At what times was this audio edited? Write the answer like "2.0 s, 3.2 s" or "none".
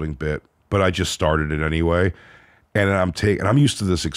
none